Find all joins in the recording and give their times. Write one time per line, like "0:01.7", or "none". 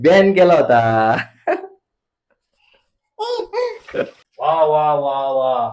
0:04.2